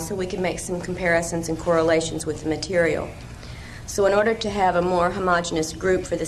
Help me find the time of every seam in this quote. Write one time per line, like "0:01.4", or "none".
0:03.8